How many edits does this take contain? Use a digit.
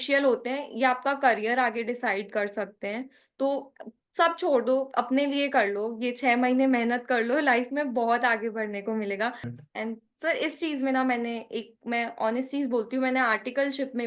1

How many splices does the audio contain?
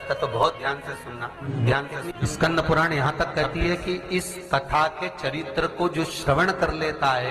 2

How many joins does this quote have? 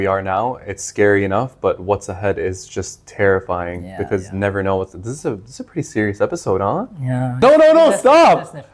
1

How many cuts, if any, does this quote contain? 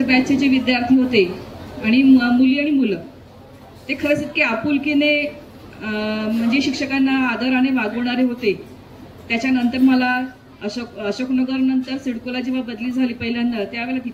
0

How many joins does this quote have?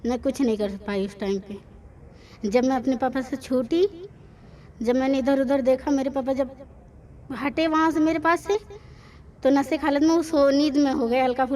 0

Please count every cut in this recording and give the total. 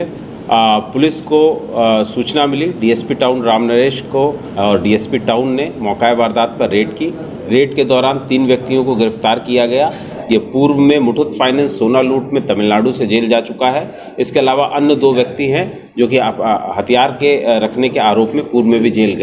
2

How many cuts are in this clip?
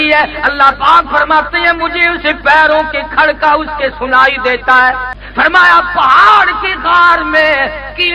1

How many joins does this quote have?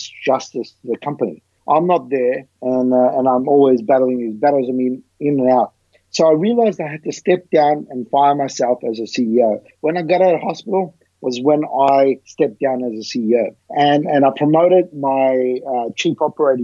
4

